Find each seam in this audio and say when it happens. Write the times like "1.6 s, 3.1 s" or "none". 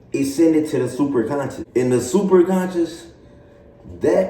1.6 s